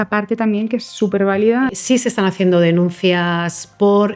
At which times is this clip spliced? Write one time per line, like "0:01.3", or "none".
0:01.7